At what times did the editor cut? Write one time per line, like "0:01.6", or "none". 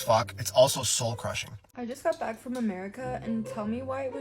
0:01.7